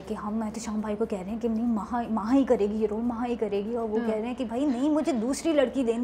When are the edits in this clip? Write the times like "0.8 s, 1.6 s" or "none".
none